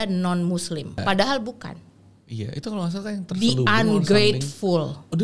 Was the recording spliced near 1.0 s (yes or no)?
yes